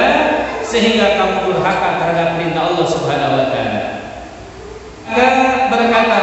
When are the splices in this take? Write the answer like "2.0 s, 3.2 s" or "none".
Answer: 5.1 s